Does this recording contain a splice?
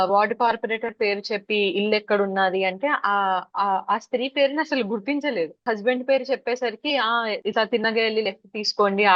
no; 0 cuts

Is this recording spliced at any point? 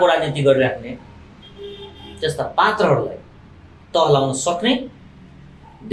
no; 0 cuts

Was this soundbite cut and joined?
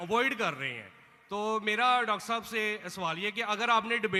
no; 0 cuts

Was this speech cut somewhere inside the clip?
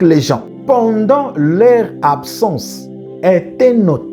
no; 0 cuts

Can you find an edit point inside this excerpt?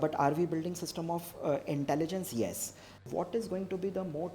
yes; 1 cut; at 3.0 s

